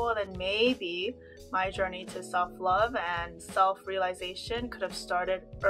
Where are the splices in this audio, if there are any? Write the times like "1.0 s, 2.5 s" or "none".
none